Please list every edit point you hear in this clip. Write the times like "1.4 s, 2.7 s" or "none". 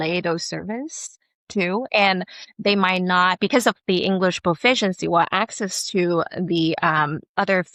none